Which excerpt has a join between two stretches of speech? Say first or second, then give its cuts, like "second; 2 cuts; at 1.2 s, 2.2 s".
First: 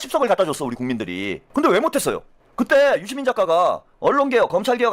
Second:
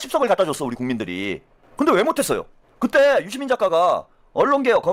first; 2 cuts; at 1.3 s, 3.9 s